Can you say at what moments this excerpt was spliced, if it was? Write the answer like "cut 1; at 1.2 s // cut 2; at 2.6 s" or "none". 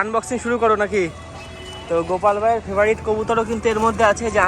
none